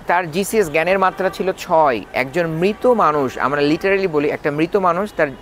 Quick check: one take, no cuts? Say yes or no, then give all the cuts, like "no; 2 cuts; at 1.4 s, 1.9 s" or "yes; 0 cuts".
yes; 0 cuts